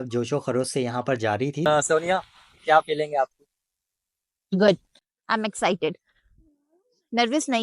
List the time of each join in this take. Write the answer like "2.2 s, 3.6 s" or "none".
1.7 s